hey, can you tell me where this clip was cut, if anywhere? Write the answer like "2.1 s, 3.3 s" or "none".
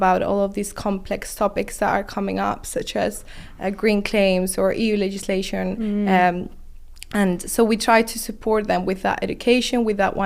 none

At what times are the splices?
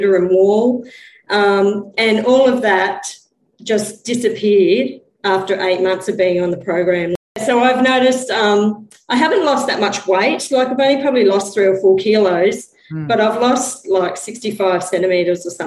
7.4 s

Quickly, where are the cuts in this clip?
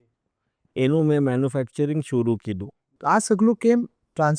2.9 s

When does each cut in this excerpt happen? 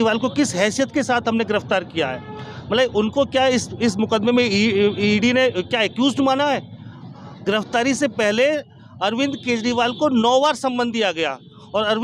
none

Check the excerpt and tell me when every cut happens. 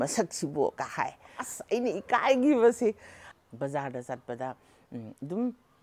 1.4 s, 3.2 s

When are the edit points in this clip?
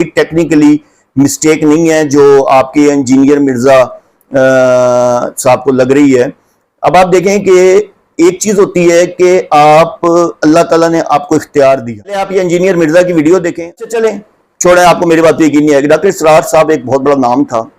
12.3 s, 13.6 s

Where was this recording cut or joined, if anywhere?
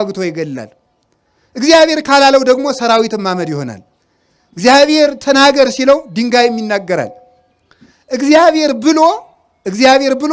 none

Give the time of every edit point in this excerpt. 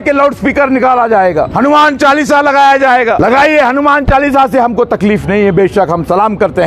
1.5 s, 3.2 s

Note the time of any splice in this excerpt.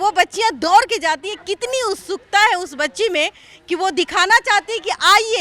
none

